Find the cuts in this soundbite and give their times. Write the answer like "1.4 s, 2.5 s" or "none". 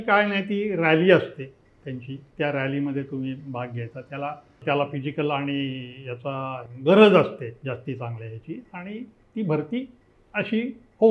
4.6 s, 7.6 s